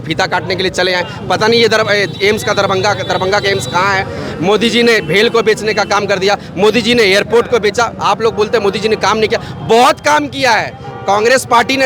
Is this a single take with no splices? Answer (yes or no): yes